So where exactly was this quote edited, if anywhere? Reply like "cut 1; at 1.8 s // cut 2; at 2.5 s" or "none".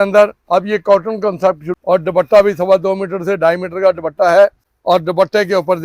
cut 1; at 1.7 s // cut 2; at 4.7 s